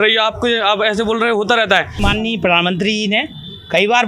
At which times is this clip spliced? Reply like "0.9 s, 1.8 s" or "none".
2.0 s